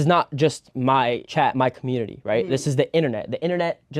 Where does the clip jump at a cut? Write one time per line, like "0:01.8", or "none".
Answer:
0:01.2